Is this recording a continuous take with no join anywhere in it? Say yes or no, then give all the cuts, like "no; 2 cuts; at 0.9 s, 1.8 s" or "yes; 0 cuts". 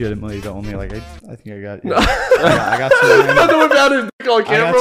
yes; 0 cuts